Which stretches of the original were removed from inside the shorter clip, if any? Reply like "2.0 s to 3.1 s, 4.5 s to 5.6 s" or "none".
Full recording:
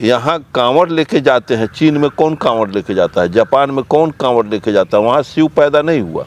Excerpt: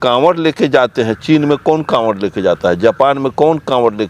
none